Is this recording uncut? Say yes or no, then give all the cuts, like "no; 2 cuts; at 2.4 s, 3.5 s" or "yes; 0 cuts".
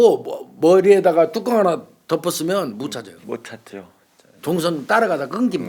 yes; 0 cuts